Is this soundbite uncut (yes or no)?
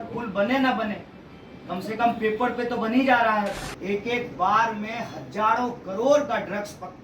no